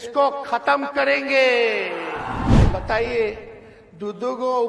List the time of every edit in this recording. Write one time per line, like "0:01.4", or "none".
0:02.6